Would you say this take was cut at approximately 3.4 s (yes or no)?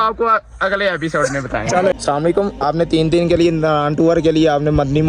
no